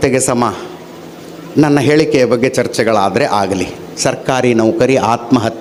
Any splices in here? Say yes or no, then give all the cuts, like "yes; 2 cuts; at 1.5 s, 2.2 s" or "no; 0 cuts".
no; 0 cuts